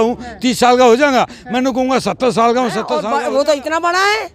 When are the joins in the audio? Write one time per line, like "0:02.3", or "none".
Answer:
0:02.9